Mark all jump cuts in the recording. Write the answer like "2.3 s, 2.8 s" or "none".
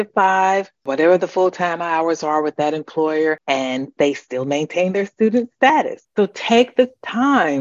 6.0 s